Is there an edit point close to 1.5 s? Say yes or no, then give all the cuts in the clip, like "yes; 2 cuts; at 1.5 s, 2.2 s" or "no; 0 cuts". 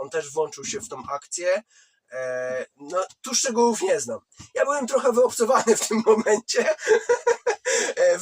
no; 0 cuts